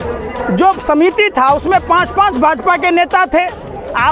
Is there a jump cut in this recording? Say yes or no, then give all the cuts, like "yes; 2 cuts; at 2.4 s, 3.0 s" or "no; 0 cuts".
no; 0 cuts